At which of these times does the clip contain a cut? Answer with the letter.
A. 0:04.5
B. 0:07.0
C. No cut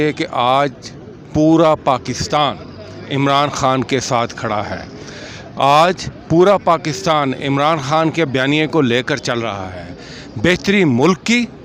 C